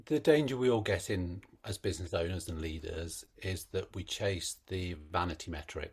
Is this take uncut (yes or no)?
yes